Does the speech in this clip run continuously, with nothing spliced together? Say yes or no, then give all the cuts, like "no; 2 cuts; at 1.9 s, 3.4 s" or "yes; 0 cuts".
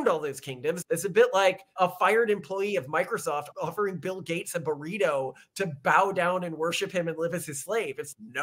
no; 3 cuts; at 0.8 s, 1.7 s, 3.5 s